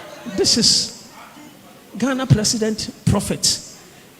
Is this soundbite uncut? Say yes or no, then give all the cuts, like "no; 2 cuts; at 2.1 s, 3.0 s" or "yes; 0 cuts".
yes; 0 cuts